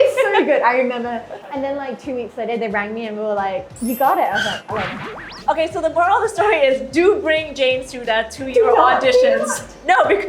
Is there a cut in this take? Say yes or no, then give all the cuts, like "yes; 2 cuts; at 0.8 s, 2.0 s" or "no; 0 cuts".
yes; 3 cuts; at 1.4 s, 3.7 s, 5.4 s